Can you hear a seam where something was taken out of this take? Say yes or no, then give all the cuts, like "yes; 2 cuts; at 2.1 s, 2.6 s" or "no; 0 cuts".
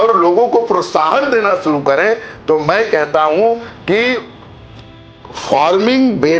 no; 0 cuts